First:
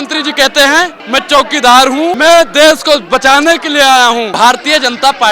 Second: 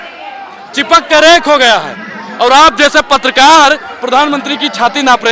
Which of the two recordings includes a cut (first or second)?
first